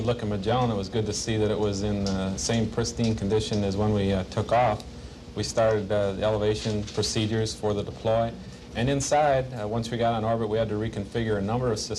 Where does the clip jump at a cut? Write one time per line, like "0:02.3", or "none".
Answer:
0:06.7